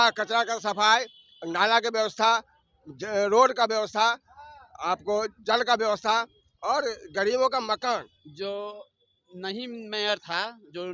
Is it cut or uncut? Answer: cut